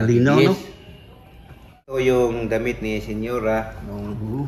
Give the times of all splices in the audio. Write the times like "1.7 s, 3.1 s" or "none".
1.9 s